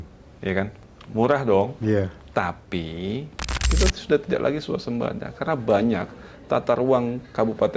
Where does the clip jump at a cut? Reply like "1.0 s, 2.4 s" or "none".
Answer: 3.6 s